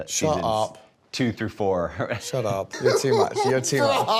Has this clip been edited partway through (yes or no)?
yes